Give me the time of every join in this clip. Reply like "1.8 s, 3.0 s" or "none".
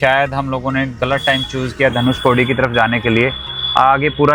none